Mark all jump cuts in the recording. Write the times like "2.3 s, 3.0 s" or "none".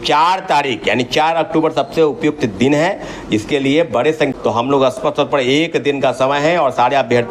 4.3 s